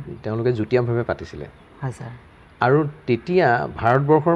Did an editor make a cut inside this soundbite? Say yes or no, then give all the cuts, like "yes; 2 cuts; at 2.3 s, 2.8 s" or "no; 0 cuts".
no; 0 cuts